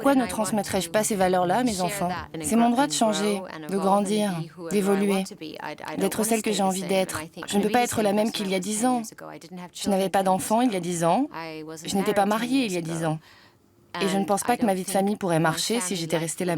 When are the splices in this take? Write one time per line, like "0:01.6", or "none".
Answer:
0:02.3
0:07.4